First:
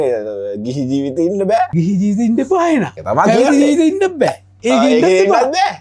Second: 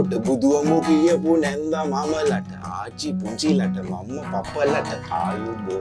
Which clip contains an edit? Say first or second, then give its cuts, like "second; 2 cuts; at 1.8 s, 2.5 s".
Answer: first; 2 cuts; at 1.7 s, 3.0 s